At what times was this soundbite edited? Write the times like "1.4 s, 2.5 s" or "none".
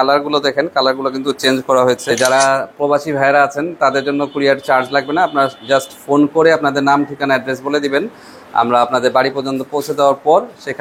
2.1 s